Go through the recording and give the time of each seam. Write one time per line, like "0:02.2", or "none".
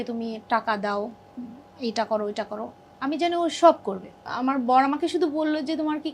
0:04.3